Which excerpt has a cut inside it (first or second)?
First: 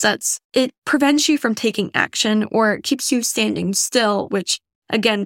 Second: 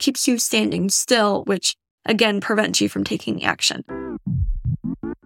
second